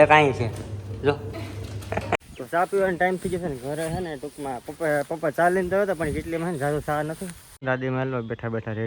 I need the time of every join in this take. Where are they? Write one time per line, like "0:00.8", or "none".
0:02.2
0:07.6